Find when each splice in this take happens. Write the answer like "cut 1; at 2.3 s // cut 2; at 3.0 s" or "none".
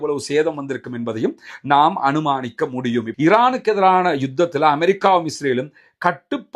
cut 1; at 3.1 s